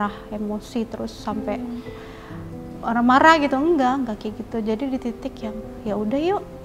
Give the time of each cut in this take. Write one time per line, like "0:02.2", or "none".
none